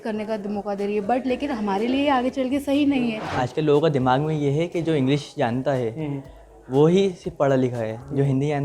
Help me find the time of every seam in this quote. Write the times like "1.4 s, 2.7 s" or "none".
3.2 s